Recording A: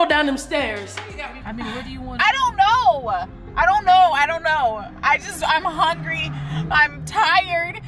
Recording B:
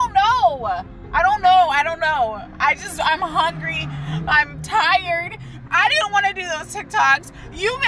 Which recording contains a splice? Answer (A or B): A